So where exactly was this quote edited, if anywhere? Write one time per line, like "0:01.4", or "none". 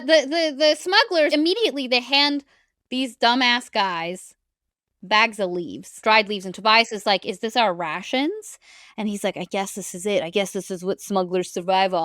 0:01.3
0:05.8